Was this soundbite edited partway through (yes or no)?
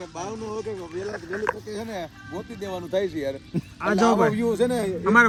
no